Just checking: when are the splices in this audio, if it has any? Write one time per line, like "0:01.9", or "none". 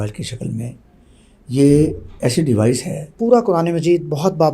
0:03.1